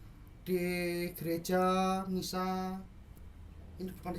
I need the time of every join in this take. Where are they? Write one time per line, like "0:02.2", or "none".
none